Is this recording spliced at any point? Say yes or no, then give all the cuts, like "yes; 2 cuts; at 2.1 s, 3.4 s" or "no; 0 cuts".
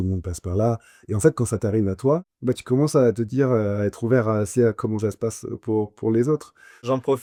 no; 0 cuts